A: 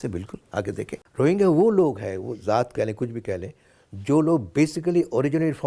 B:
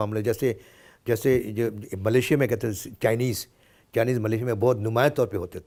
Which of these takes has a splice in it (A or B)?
A